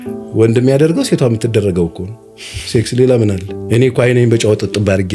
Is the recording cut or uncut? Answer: cut